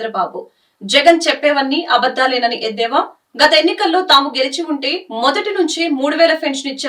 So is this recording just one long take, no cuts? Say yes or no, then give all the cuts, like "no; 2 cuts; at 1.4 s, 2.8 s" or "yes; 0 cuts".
yes; 0 cuts